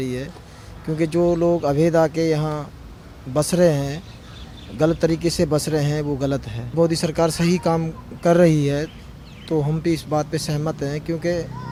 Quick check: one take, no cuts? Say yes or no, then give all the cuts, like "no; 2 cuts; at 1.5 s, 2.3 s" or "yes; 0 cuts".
yes; 0 cuts